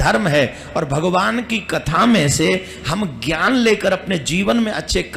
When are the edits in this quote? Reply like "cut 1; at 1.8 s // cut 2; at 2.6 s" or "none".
none